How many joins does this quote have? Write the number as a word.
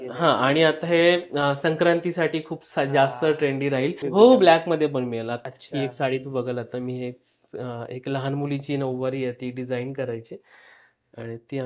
two